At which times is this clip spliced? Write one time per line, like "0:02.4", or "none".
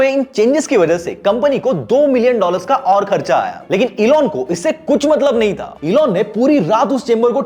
0:05.7